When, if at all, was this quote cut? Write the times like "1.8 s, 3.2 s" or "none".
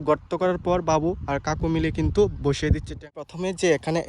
3.1 s